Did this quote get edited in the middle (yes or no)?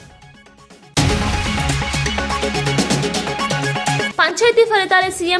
yes